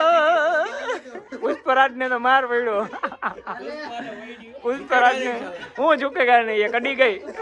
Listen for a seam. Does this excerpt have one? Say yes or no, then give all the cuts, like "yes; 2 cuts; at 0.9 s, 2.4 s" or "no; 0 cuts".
no; 0 cuts